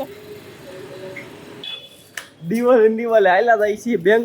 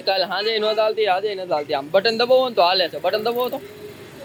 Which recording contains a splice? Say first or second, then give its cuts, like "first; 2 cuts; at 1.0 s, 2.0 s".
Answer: first; 1 cut; at 1.7 s